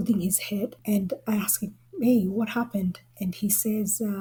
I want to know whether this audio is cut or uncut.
uncut